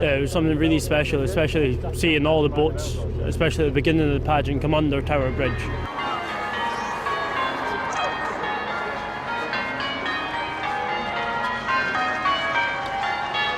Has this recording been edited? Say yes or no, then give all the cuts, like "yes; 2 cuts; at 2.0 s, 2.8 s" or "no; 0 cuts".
yes; 1 cut; at 6.2 s